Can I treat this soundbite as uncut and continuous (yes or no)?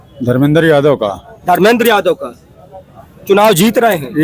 yes